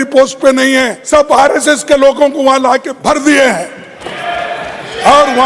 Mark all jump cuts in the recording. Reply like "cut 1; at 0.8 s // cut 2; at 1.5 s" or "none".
cut 1; at 0.9 s // cut 2; at 2.9 s